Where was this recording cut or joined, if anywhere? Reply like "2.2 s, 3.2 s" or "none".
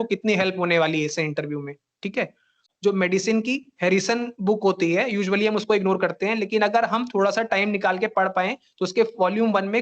2.7 s